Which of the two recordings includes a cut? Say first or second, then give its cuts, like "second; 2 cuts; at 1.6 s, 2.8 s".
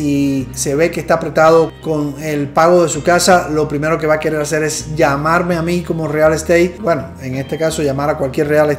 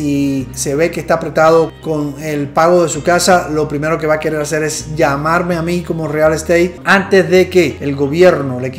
second; 1 cut; at 6.8 s